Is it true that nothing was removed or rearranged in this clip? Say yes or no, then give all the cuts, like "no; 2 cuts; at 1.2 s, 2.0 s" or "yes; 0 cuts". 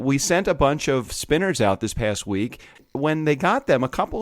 no; 2 cuts; at 1.1 s, 2.8 s